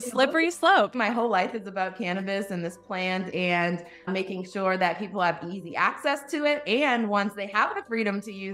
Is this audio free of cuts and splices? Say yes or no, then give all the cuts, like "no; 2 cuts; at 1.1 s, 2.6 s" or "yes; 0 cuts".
no; 2 cuts; at 0.9 s, 4.1 s